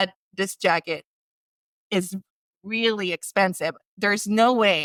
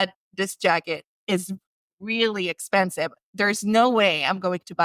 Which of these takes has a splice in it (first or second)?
second